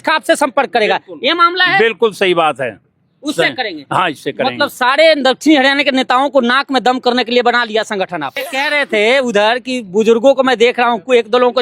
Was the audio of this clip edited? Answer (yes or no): yes